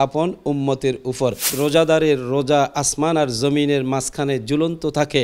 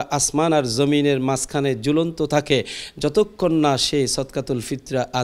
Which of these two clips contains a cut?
first; 1 cut; at 1.5 s

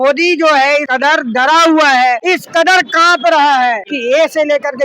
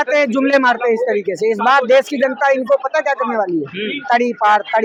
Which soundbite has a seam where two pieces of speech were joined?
first; 3 cuts; at 0.9 s, 2.2 s, 3.9 s

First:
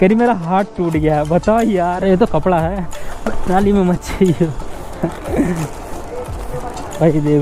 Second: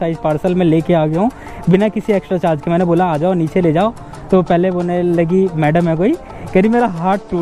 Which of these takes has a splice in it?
first; 1 cut; at 2.0 s

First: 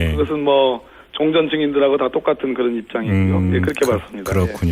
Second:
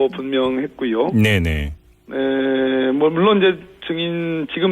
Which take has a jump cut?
second; 1 cut; at 1.4 s

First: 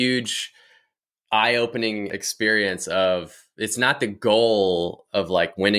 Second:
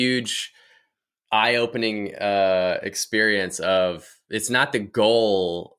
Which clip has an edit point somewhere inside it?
first; 1 cut; at 2.1 s

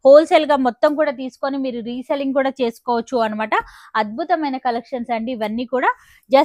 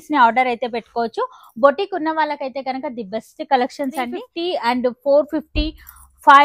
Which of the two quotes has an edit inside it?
second; 1 cut; at 4.2 s

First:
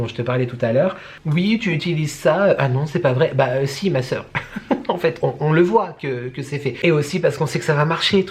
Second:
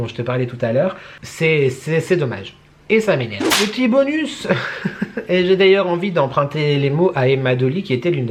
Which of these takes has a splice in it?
first; 2 cuts; at 1.2 s, 6.8 s

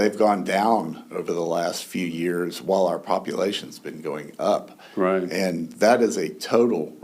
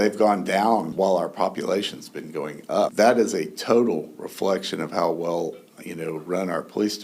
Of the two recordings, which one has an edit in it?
second; 2 cuts; at 0.9 s, 2.9 s

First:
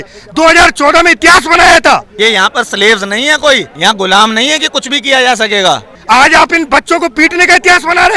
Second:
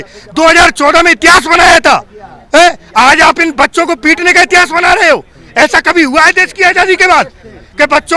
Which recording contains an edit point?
first; 3 cuts; at 2.1 s, 3.7 s, 6.0 s

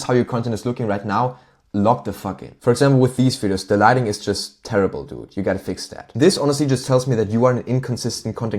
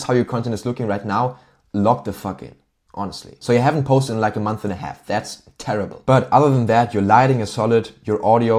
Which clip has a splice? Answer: first; 2 cuts; at 2.5 s, 6.0 s

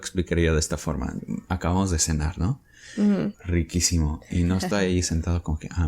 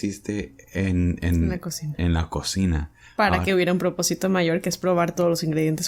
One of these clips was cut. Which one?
first; 1 cut; at 3.3 s

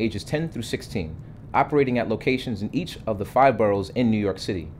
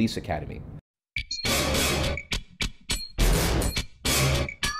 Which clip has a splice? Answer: first; 1 cut; at 3.7 s

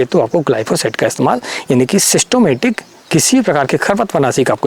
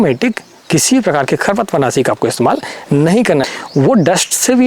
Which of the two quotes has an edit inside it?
second; 1 cut; at 3.5 s

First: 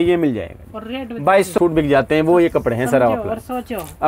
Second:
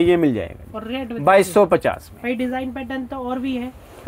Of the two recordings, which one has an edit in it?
first; 1 cut; at 1.6 s

